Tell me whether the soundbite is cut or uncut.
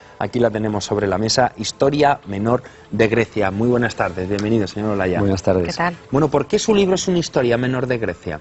cut